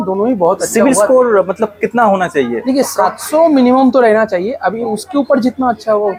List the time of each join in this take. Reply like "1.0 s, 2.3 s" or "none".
none

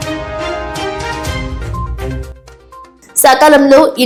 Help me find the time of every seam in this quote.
none

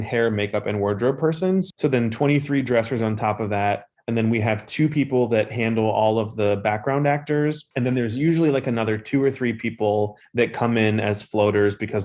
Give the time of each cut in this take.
1.7 s, 3.9 s, 10.2 s

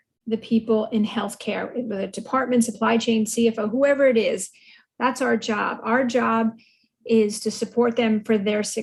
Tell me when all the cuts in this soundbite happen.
none

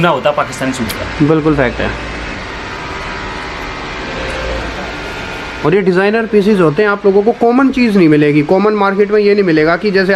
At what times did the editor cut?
none

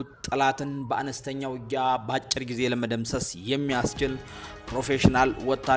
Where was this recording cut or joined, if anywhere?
none

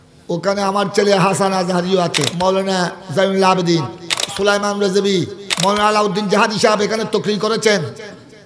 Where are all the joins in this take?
2.3 s, 4.2 s, 5.4 s

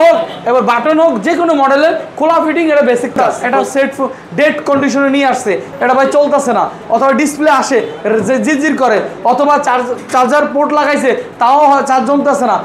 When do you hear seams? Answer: 3.2 s, 5.7 s

